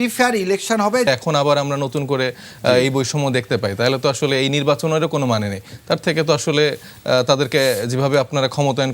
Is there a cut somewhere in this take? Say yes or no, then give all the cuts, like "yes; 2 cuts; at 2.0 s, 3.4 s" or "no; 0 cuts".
yes; 1 cut; at 1.1 s